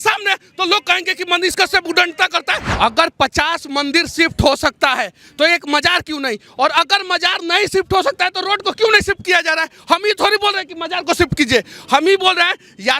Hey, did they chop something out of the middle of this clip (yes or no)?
yes